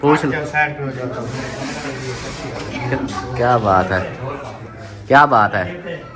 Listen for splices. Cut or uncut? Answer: uncut